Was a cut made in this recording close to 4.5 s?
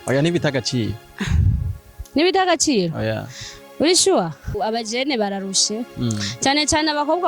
yes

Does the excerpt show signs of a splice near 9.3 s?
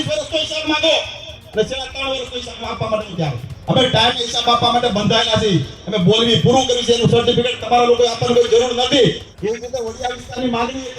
yes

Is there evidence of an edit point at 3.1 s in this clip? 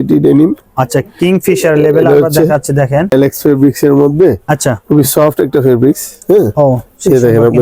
yes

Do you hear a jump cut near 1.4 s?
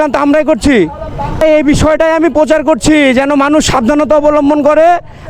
yes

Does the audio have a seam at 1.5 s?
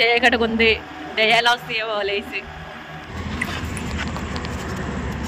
no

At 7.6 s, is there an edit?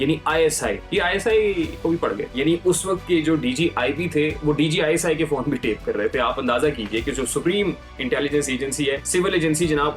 no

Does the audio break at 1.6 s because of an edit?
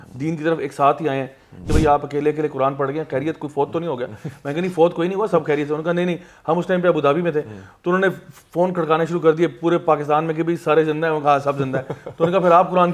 yes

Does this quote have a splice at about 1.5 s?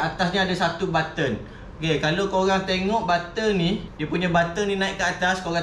no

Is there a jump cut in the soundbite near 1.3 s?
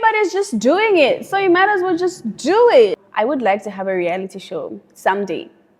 no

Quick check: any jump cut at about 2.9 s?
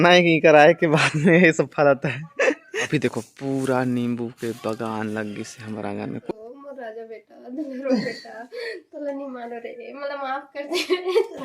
yes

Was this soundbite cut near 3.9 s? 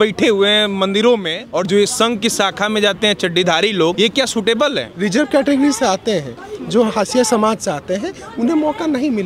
yes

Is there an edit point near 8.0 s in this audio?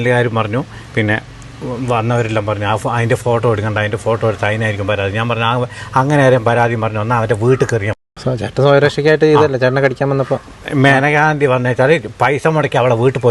yes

